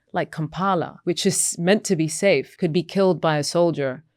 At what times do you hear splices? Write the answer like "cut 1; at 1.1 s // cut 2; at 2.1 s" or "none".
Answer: cut 1; at 0.9 s // cut 2; at 2.5 s

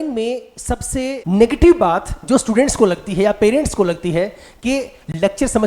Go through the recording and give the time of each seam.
cut 1; at 1.2 s

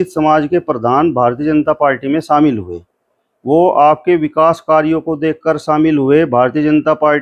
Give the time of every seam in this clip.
none

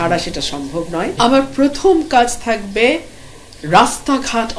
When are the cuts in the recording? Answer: cut 1; at 1.1 s

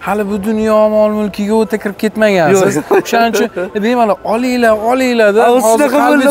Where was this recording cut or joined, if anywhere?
none

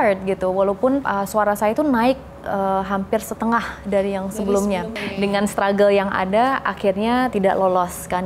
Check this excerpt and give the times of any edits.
cut 1; at 1.1 s // cut 2; at 5.1 s // cut 3; at 7.3 s

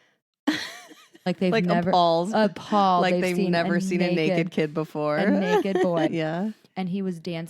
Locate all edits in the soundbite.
cut 1; at 6.1 s

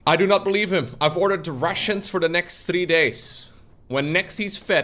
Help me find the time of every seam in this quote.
cut 1; at 0.9 s

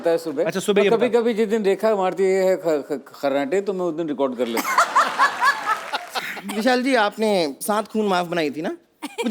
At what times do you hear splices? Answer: cut 1; at 5.7 s

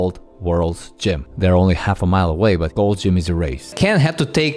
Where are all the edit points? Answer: cut 1; at 1.3 s // cut 2; at 2.7 s // cut 3; at 3.8 s

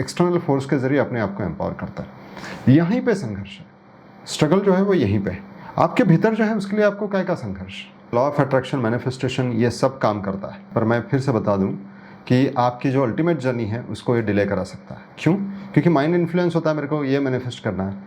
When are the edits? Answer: cut 1; at 8.1 s // cut 2; at 10.7 s

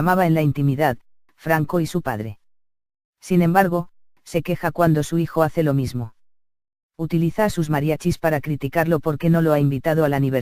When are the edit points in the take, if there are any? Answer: cut 1; at 7.0 s

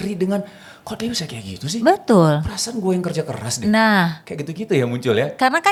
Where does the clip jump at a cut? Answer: none

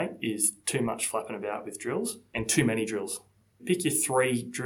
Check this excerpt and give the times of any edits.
cut 1; at 2.3 s // cut 2; at 3.6 s

